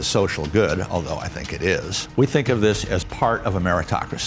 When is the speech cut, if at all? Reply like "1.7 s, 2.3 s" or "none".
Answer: 2.0 s, 3.1 s